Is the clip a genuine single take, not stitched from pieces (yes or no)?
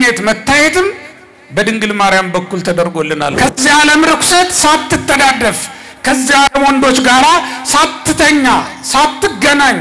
no